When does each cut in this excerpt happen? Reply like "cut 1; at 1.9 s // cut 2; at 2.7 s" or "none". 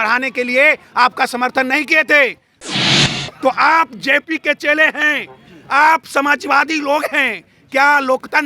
cut 1; at 2.7 s